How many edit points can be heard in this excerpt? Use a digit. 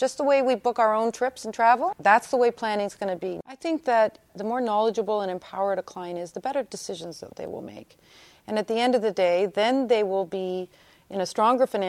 1